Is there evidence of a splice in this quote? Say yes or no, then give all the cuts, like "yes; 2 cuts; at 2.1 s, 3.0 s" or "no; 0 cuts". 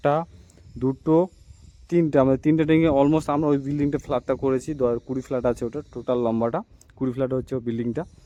no; 0 cuts